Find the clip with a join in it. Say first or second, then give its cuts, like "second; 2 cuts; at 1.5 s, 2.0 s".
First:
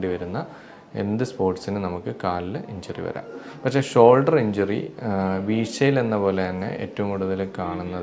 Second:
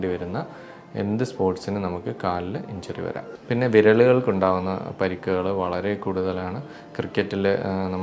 second; 1 cut; at 3.3 s